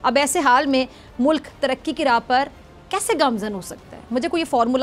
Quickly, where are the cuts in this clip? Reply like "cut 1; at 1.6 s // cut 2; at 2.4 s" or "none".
none